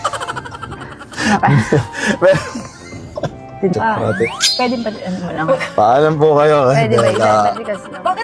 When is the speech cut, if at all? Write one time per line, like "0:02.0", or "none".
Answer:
none

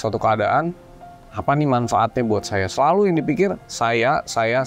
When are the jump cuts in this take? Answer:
none

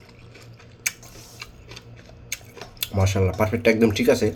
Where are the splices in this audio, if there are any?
none

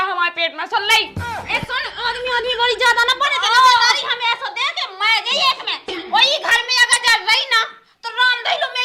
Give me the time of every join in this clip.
0:05.9

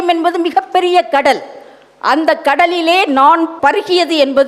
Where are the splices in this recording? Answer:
0:03.5

